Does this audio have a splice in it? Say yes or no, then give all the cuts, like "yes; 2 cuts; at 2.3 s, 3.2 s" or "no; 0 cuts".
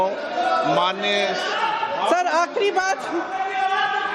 yes; 1 cut; at 2.7 s